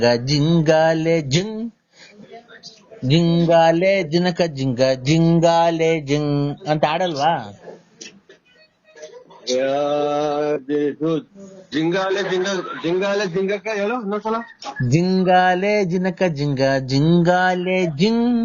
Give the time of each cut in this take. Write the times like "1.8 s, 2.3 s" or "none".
none